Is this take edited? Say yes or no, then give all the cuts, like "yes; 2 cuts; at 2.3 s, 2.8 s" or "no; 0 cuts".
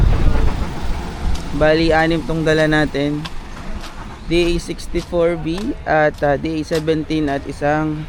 no; 0 cuts